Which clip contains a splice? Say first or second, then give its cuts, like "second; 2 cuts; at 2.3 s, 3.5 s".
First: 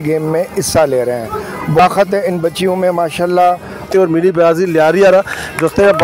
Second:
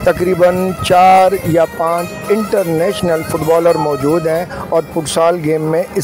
first; 2 cuts; at 1.8 s, 3.9 s